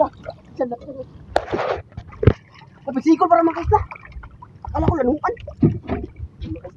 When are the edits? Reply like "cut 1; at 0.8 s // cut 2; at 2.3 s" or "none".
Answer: none